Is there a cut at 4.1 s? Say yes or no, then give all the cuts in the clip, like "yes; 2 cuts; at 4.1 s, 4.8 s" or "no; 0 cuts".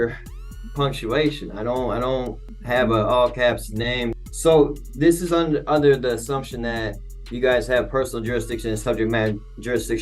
yes; 2 cuts; at 2.5 s, 4.1 s